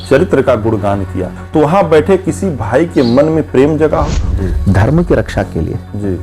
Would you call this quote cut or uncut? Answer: cut